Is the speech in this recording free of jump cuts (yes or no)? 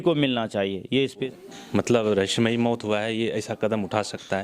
no